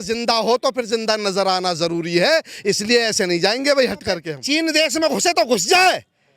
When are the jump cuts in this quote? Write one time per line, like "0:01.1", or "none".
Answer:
0:04.3